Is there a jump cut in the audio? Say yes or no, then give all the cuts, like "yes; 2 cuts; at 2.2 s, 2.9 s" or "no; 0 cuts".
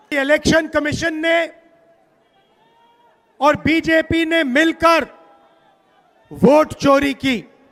no; 0 cuts